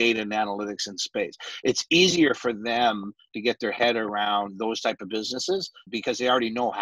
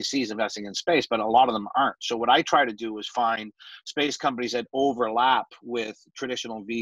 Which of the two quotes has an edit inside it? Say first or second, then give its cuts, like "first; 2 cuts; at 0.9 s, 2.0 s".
first; 1 cut; at 5.9 s